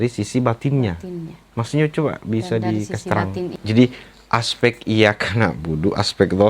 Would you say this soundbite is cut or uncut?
cut